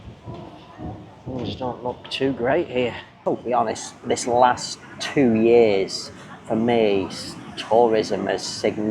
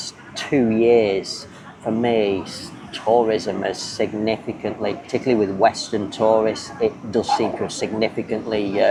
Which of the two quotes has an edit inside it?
first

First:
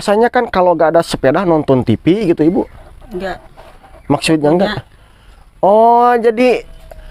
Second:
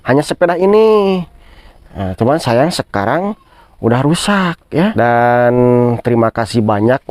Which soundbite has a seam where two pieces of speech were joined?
second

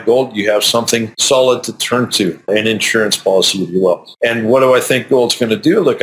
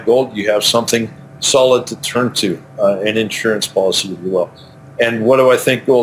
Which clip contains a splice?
first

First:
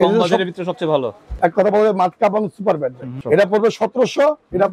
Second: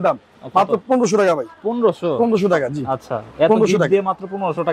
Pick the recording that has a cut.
first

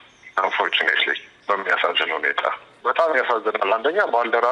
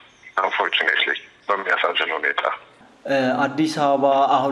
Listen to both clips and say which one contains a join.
first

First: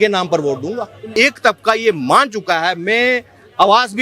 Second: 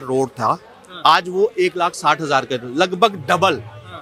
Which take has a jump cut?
first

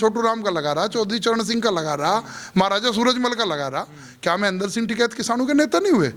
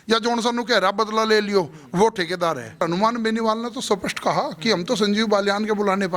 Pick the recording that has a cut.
second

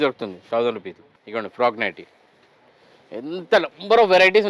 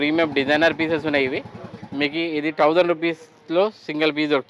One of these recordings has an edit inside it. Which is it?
first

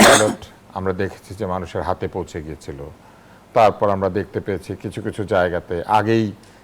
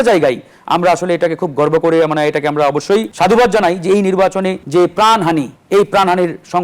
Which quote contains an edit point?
second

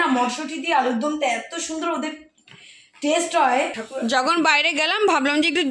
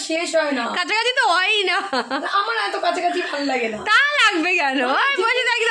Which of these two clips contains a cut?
first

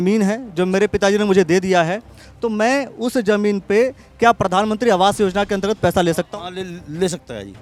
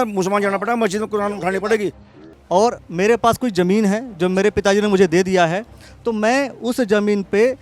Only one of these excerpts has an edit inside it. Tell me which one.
second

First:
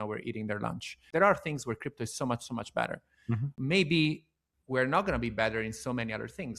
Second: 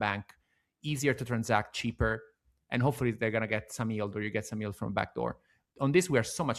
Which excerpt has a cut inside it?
first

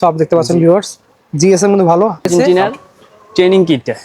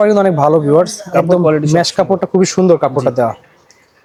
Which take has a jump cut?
first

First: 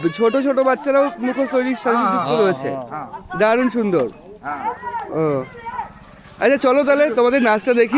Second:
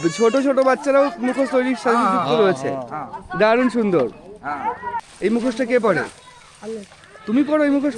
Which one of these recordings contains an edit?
second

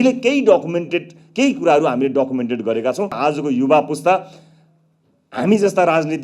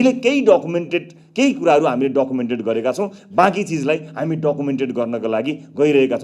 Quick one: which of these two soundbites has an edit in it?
first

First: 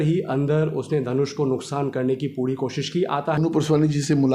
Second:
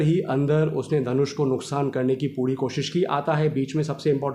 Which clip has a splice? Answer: first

